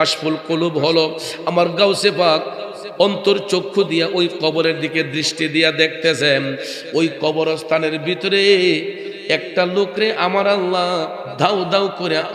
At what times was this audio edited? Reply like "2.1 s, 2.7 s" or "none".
none